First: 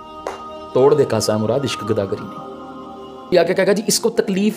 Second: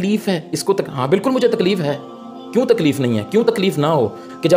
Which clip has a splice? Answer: first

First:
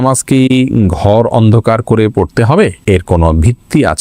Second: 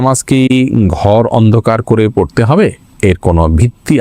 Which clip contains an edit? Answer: first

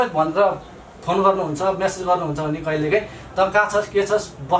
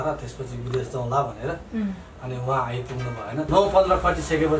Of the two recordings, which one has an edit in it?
second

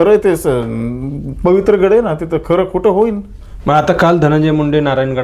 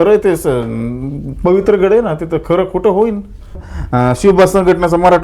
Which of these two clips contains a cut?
second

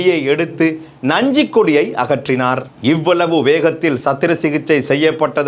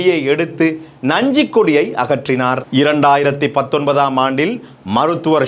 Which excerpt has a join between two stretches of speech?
second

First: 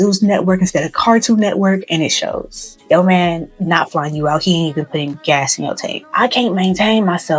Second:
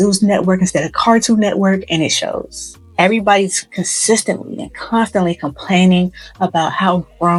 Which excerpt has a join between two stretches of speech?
first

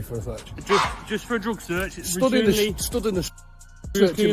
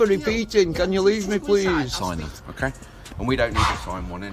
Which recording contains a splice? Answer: second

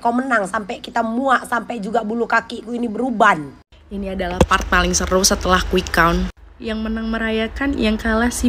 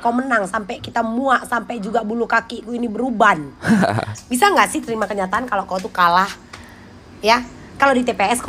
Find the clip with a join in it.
first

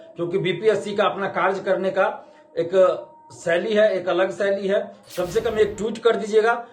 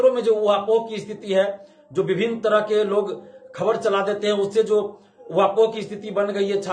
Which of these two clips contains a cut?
first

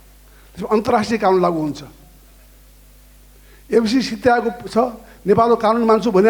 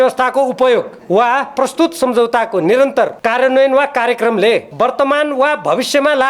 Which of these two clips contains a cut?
second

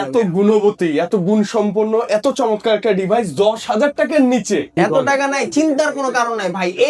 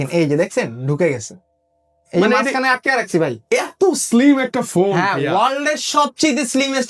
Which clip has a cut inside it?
first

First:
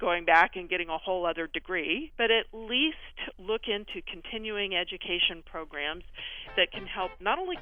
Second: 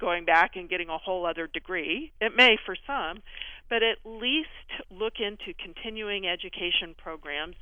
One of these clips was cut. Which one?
first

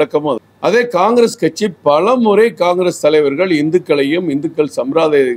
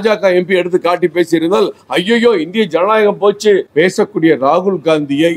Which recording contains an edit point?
second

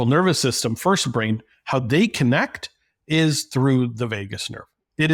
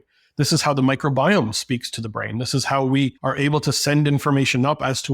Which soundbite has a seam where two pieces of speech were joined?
second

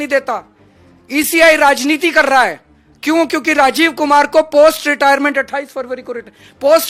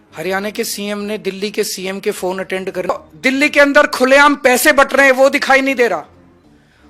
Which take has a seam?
second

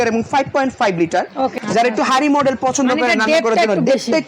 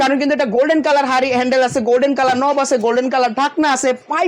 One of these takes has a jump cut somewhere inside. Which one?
first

